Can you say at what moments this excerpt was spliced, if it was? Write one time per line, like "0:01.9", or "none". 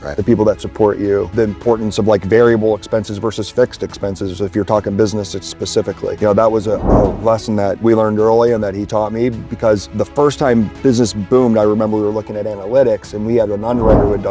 0:01.3
0:06.2
0:07.8
0:09.9

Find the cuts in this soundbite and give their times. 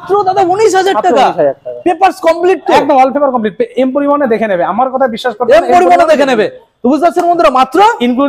none

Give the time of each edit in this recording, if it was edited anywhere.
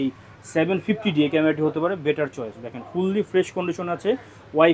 none

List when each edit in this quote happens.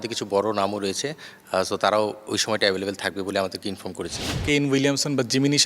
0:04.4

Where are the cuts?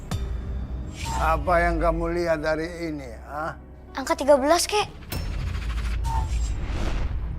0:01.1

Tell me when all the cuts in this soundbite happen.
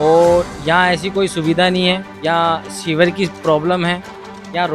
0:02.1

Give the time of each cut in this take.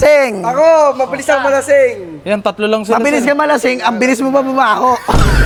none

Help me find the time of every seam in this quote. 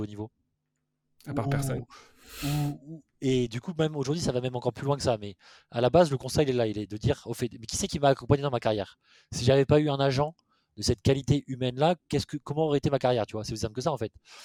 none

